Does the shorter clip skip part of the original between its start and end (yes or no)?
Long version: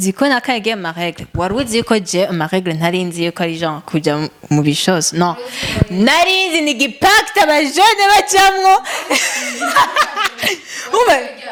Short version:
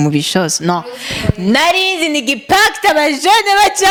no